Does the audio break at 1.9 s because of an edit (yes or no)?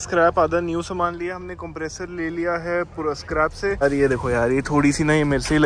no